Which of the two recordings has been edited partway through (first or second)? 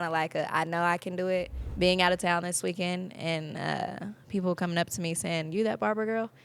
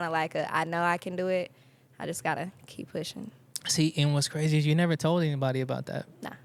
first